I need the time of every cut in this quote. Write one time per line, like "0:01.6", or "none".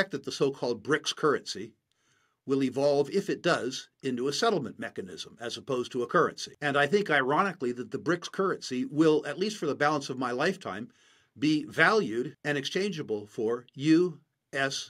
0:06.5
0:12.3